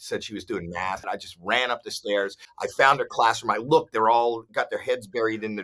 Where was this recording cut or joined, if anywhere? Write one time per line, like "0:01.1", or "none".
0:01.0
0:02.5